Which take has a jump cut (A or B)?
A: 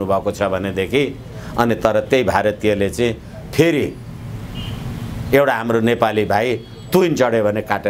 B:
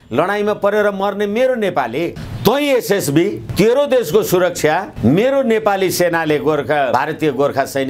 B